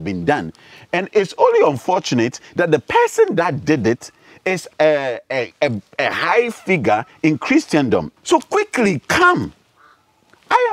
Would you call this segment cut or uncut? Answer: cut